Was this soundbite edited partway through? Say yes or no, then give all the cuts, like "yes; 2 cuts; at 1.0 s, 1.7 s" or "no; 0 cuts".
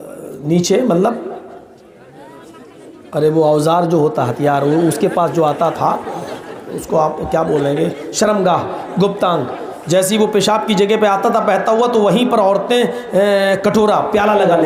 no; 0 cuts